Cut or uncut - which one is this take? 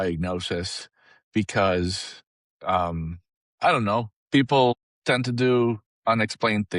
cut